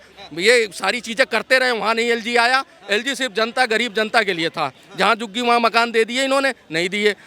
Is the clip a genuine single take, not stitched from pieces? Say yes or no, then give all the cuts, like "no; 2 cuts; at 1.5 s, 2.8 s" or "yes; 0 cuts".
yes; 0 cuts